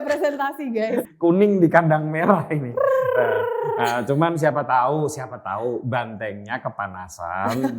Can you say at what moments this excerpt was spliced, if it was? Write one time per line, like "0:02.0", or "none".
0:01.1